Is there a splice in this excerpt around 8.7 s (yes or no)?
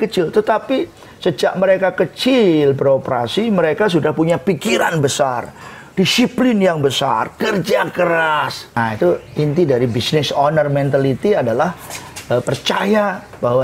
yes